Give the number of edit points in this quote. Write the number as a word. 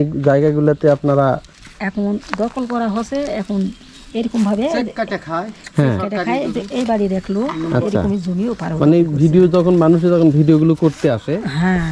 zero